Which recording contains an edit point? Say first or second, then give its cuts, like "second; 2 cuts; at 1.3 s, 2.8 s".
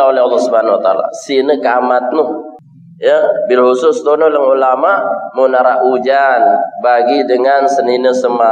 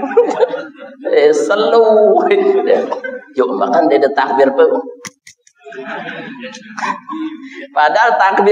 first; 1 cut; at 2.5 s